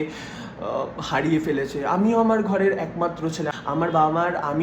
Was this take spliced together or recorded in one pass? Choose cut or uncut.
cut